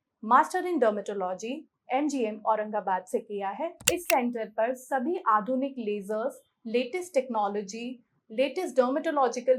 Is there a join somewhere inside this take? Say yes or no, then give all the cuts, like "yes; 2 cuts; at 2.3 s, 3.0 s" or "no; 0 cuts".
yes; 1 cut; at 3.8 s